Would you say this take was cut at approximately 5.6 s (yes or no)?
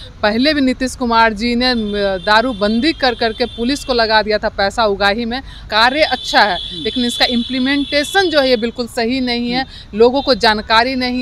yes